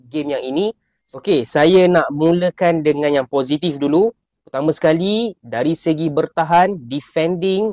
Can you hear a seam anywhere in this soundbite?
no; 0 cuts

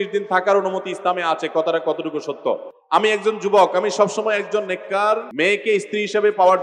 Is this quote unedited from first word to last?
no; 2 cuts; at 2.7 s, 5.3 s

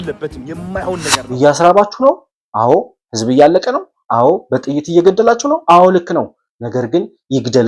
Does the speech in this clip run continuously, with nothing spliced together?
no; 1 cut; at 1.2 s

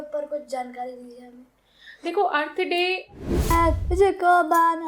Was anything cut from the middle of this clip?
yes; 1 cut; at 3.5 s

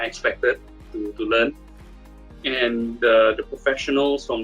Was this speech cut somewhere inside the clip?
no; 0 cuts

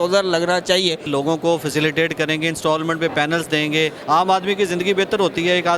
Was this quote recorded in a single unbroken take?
no; 2 cuts; at 1.0 s, 4.0 s

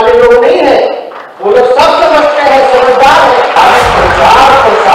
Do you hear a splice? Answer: yes; 1 cut; at 3.5 s

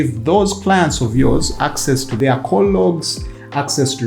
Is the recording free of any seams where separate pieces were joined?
no; 1 cut; at 2.1 s

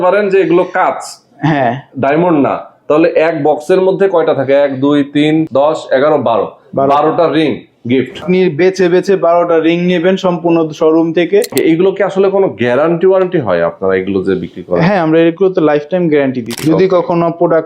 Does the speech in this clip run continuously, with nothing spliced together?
no; 4 cuts; at 5.5 s, 8.2 s, 11.5 s, 16.5 s

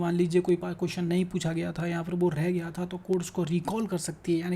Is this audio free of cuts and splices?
yes; 0 cuts

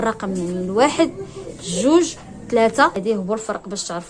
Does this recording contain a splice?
yes; 1 cut; at 3.0 s

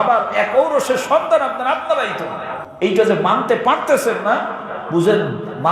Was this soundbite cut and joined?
yes; 1 cut; at 2.6 s

